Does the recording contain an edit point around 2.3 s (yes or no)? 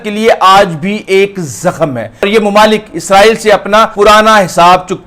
yes